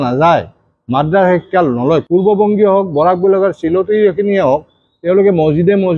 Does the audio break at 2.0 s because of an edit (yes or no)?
yes